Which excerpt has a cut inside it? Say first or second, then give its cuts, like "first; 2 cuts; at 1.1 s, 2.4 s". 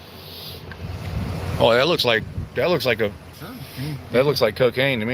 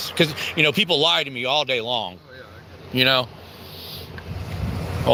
first; 1 cut; at 3.2 s